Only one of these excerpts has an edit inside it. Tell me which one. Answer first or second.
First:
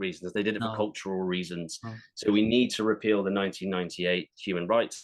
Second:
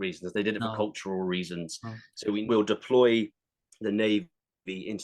second